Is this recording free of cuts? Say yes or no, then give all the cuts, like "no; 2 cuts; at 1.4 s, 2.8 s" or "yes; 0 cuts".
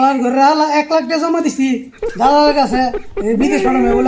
yes; 0 cuts